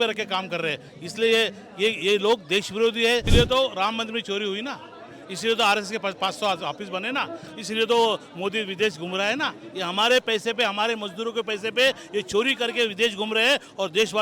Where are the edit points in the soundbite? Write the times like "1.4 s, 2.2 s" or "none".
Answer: 3.3 s